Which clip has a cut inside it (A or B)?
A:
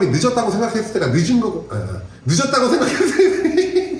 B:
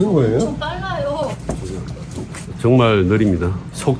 B